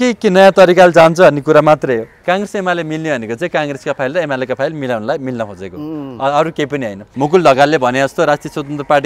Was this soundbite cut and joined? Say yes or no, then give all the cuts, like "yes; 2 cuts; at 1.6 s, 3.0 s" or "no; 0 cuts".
yes; 2 cuts; at 2.1 s, 7.0 s